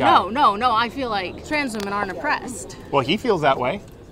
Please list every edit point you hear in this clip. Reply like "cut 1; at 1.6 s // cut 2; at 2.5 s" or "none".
cut 1; at 1.4 s